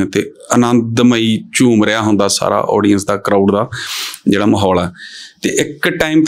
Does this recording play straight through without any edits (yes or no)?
yes